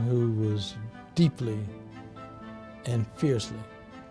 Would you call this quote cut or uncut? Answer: uncut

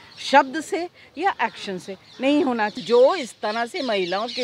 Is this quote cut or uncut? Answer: cut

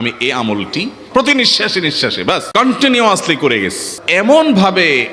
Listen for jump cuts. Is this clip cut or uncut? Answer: cut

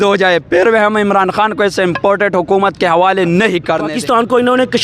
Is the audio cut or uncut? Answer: cut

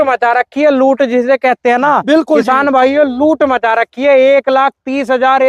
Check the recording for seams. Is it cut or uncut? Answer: uncut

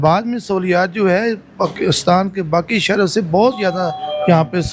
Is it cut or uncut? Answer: uncut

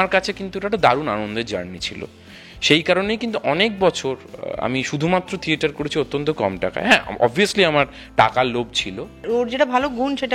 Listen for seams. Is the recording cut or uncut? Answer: cut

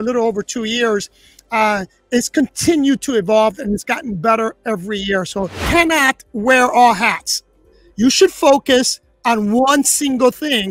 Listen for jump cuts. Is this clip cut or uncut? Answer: cut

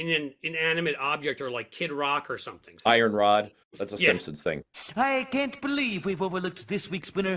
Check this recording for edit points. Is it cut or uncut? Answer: cut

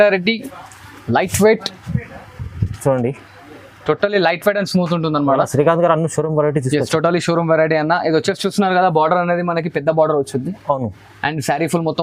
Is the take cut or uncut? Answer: uncut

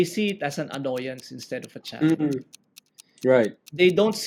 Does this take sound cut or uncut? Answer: uncut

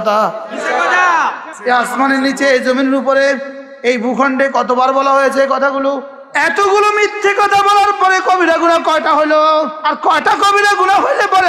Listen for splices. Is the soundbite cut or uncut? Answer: cut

